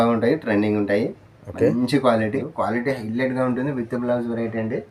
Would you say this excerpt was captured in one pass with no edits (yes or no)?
no